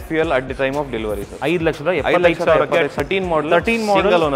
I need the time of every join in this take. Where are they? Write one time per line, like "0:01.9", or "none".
0:01.3
0:02.9